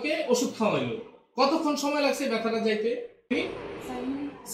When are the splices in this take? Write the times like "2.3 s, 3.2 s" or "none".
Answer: 3.3 s